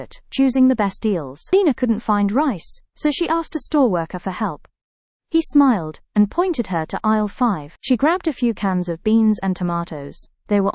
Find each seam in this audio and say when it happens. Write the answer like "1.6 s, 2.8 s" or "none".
1.4 s